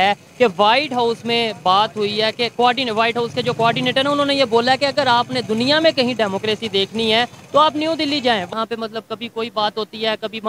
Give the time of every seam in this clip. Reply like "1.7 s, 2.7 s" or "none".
8.5 s